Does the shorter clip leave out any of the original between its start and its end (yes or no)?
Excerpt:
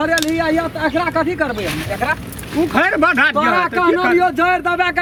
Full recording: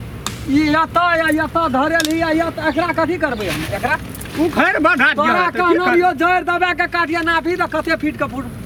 no